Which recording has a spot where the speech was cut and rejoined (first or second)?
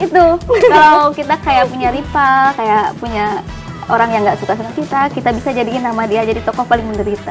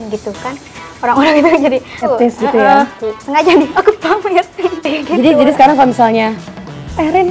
second